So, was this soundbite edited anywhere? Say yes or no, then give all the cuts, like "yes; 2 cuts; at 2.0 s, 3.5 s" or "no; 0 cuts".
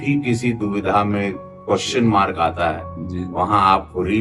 no; 0 cuts